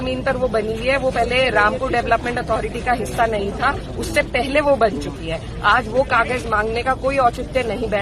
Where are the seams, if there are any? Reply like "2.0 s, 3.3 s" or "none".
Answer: none